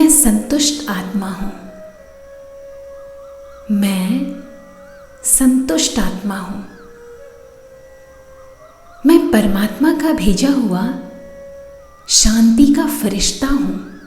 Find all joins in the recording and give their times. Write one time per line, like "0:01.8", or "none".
0:01.7
0:03.2

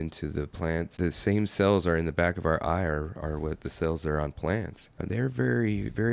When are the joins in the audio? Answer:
0:00.9
0:04.9

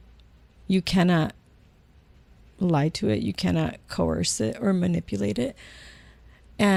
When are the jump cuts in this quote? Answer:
none

